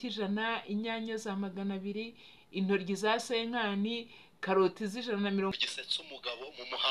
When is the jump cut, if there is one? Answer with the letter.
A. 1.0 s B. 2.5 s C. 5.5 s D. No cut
C